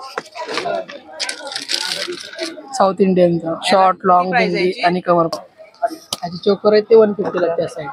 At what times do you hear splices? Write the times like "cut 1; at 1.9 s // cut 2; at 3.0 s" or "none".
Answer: cut 1; at 5.3 s